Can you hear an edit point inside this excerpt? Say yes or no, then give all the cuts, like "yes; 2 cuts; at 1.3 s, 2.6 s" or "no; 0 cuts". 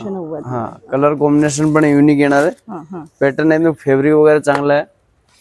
no; 0 cuts